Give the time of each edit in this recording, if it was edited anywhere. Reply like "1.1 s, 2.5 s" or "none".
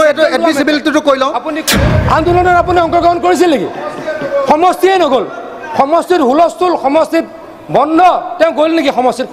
1.6 s